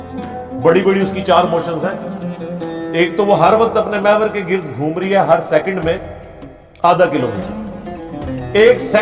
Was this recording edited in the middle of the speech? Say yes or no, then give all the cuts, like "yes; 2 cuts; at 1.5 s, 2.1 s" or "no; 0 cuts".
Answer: no; 0 cuts